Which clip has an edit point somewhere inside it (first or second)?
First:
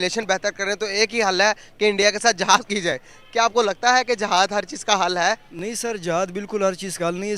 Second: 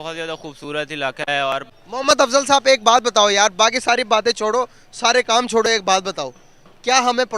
second